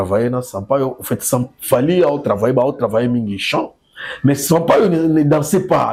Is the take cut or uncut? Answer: uncut